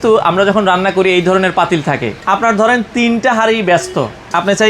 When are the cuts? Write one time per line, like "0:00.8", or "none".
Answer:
0:02.1